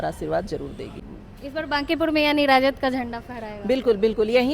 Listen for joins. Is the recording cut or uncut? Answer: cut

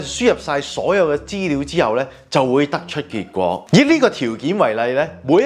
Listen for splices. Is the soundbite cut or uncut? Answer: uncut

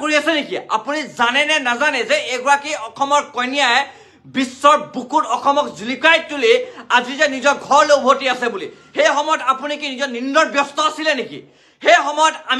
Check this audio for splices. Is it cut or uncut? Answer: uncut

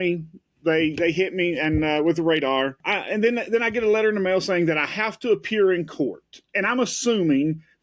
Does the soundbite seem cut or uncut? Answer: cut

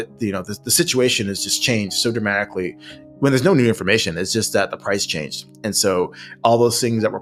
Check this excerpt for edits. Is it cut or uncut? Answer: uncut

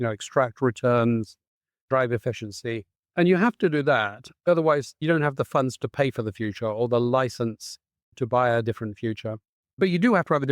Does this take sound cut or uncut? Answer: cut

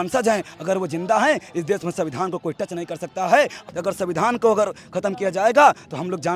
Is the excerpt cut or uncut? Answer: cut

